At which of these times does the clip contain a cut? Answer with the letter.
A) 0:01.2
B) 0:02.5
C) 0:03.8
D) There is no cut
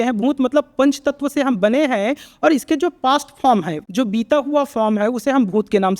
C